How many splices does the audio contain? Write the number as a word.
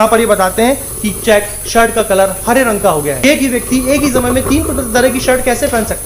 one